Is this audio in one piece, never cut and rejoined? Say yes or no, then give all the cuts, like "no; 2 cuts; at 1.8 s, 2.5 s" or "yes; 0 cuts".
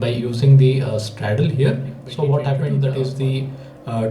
no; 1 cut; at 2.7 s